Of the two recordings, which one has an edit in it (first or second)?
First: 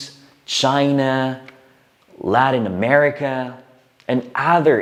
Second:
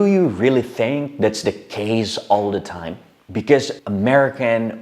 second